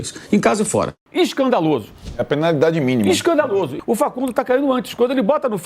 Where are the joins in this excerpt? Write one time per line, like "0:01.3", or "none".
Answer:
0:01.0
0:03.7